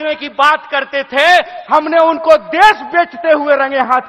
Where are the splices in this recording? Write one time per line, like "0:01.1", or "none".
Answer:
none